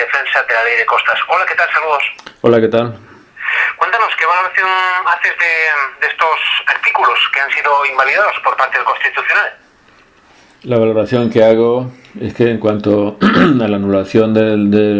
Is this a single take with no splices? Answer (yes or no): no